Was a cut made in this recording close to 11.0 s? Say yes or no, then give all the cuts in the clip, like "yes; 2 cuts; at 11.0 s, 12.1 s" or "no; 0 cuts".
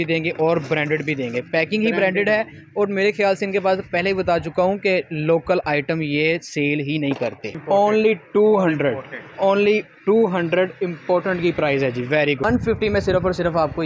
no; 2 cuts; at 7.6 s, 12.4 s